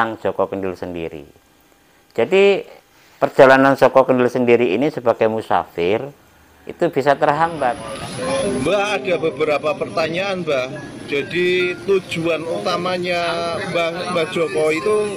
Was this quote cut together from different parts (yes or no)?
yes